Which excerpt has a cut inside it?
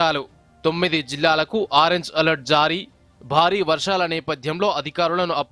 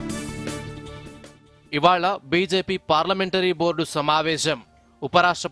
second; 1 cut; at 1.7 s

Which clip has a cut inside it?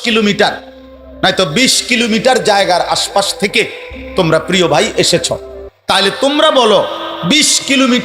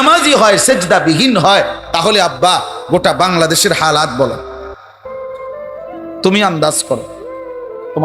second; 2 cuts; at 4.6 s, 6.1 s

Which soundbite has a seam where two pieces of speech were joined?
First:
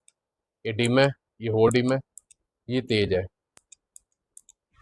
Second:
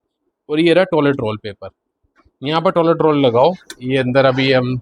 second; 1 cut; at 3.7 s

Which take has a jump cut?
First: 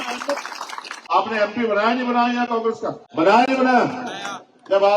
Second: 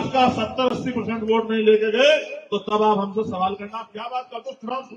first; 2 cuts; at 1.0 s, 3.0 s

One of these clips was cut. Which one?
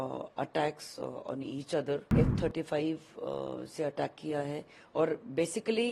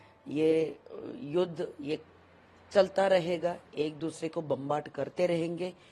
first; 1 cut; at 2.1 s

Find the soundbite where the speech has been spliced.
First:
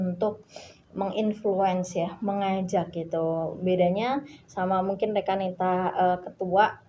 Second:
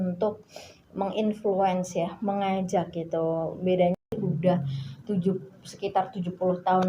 second; 1 cut; at 4.0 s

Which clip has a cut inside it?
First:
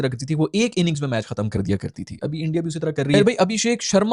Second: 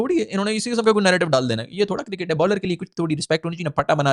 first; 1 cut; at 3.1 s

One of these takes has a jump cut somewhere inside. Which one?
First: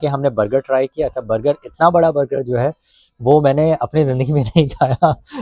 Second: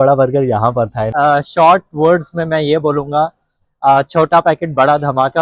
second; 1 cut; at 1.0 s

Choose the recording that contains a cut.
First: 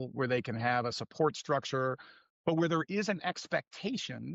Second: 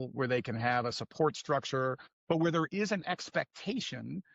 second; 1 cut; at 2.1 s

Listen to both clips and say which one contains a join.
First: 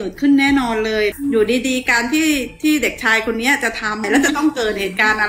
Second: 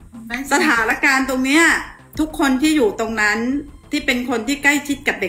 first; 2 cuts; at 1.1 s, 4.0 s

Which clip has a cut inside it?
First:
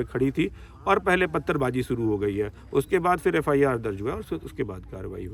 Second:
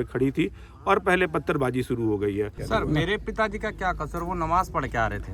second; 1 cut; at 2.6 s

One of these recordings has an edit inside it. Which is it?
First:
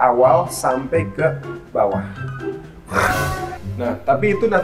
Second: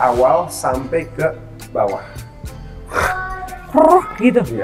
first; 1 cut; at 3.6 s

